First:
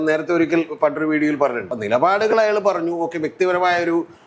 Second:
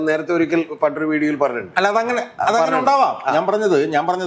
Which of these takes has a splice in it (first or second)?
first